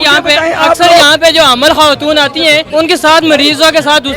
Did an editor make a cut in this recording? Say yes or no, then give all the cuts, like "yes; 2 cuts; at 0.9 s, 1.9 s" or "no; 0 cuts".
yes; 1 cut; at 2.7 s